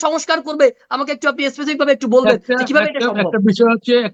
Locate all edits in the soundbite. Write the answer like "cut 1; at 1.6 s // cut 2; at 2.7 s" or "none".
none